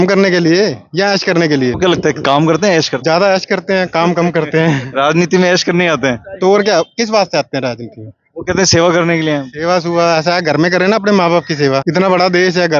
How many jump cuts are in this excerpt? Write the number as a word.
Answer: three